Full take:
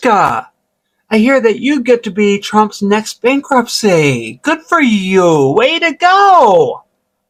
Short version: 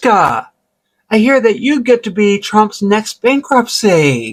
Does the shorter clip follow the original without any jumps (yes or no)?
yes